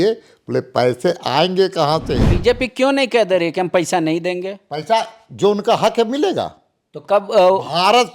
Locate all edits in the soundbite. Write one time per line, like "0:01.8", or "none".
0:02.2